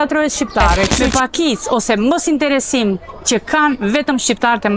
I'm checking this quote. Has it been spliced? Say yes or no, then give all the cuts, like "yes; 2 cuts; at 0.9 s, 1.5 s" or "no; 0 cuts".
yes; 1 cut; at 1.0 s